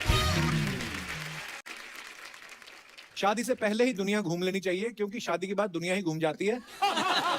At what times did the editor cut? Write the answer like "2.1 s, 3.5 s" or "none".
1.7 s